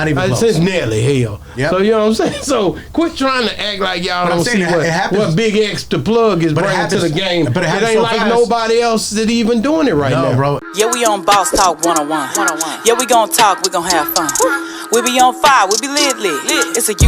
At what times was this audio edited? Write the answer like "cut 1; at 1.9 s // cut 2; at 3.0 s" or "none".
cut 1; at 10.7 s